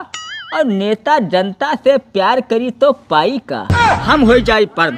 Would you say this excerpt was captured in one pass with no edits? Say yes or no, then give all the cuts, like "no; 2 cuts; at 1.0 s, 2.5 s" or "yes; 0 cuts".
no; 1 cut; at 3.7 s